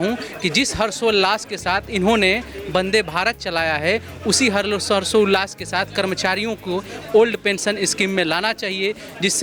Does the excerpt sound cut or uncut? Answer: uncut